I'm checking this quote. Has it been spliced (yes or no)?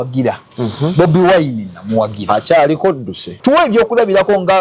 yes